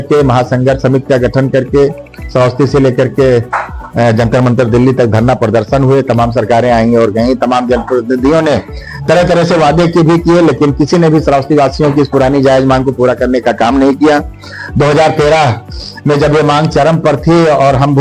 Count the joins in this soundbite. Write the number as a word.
zero